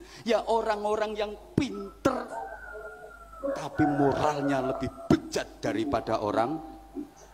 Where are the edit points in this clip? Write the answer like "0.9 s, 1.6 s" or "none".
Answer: none

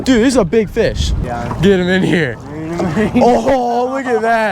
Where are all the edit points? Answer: 1.1 s

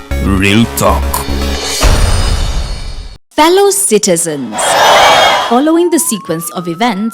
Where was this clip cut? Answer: 3.2 s

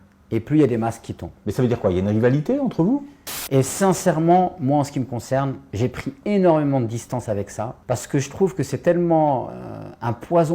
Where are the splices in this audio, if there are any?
3.4 s, 5.6 s

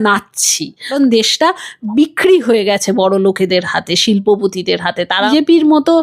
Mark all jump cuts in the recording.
0.9 s, 1.8 s, 5.2 s

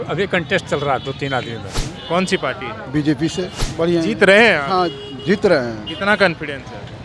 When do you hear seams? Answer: 1.9 s, 3.6 s

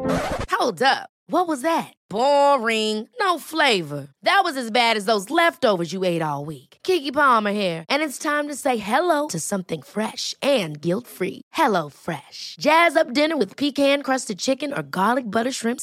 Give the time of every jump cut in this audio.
none

